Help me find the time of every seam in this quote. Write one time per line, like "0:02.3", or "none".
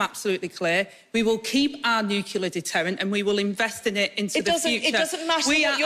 none